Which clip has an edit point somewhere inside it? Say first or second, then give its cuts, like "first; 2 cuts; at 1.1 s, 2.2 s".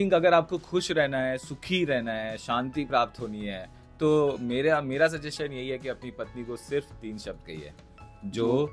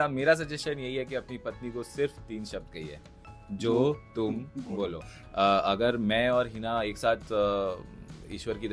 second; 1 cut; at 5.2 s